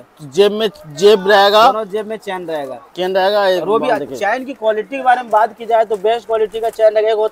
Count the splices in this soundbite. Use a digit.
0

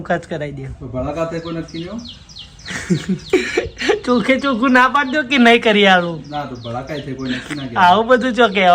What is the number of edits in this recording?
0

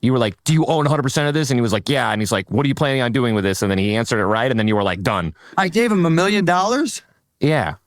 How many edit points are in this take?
1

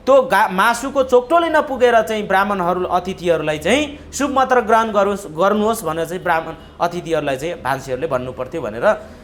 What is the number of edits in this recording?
0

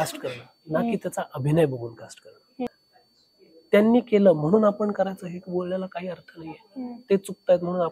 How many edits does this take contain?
1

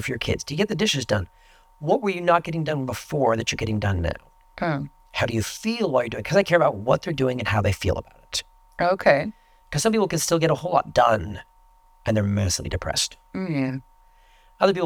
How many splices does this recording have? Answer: 0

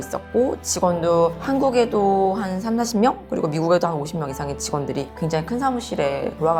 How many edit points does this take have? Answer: 0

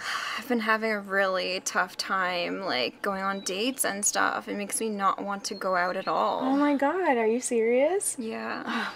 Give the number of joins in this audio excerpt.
1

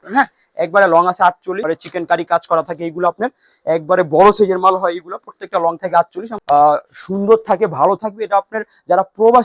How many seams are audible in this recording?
2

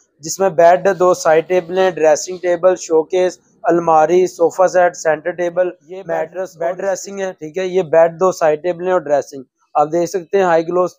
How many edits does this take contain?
1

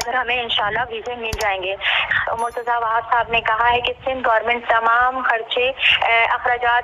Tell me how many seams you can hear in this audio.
0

